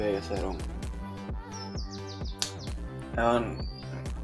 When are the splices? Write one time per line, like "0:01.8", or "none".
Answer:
none